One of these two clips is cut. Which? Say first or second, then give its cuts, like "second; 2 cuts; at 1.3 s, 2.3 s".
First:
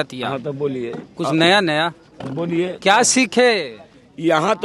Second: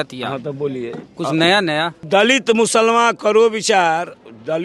second; 1 cut; at 2.1 s